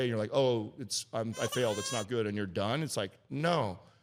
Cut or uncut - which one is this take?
uncut